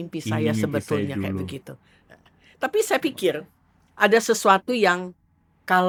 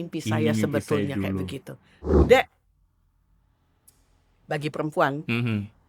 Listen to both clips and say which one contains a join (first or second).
second